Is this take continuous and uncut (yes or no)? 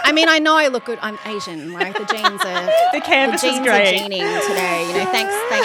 yes